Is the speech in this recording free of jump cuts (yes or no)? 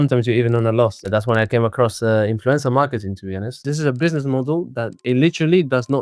no